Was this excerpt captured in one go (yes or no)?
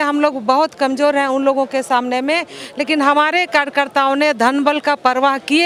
yes